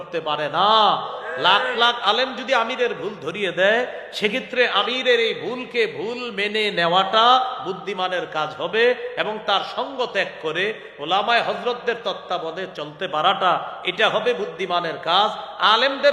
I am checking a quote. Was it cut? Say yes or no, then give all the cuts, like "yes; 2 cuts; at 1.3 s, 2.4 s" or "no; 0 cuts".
no; 0 cuts